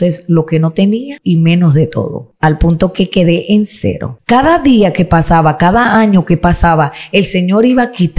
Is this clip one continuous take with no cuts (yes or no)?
no